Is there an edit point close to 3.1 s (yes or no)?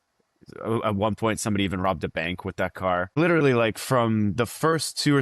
yes